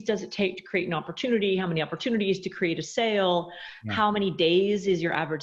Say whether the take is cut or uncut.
uncut